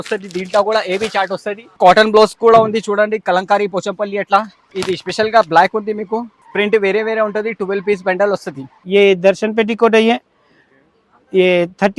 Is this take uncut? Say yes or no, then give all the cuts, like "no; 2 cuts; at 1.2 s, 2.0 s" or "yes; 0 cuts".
no; 4 cuts; at 1.8 s, 4.6 s, 6.4 s, 8.8 s